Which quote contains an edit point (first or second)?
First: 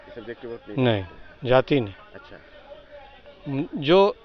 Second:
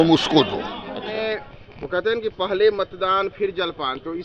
second